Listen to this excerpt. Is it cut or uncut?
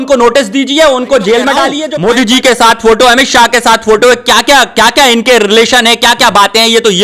cut